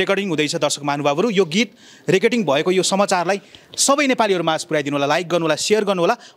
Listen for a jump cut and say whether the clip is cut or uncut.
uncut